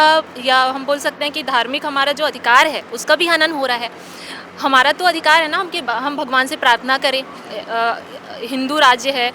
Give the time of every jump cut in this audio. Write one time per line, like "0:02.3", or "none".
none